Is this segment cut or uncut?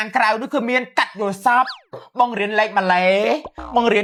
uncut